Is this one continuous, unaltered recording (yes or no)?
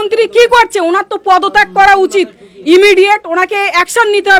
yes